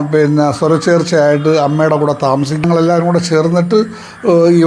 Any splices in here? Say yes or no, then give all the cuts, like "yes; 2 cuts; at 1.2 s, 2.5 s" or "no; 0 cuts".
yes; 1 cut; at 2.6 s